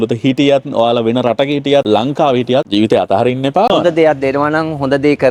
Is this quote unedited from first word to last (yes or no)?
yes